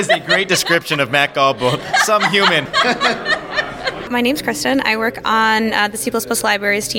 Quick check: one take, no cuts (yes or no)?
no